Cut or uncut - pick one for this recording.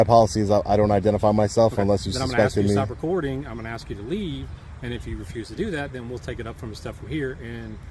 uncut